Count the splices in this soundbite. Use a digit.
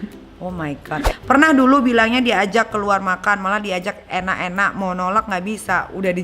1